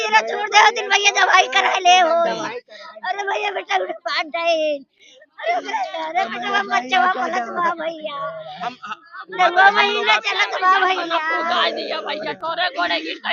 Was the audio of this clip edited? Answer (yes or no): no